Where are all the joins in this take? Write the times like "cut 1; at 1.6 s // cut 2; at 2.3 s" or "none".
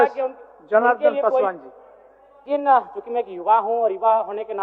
cut 1; at 2.5 s